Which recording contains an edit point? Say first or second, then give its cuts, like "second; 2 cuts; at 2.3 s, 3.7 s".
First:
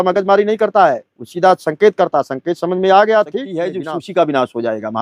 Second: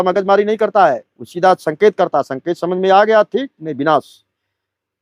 first; 1 cut; at 3.6 s